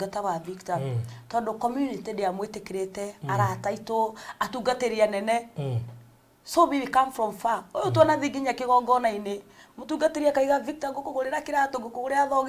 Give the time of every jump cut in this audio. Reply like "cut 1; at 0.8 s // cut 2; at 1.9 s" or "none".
none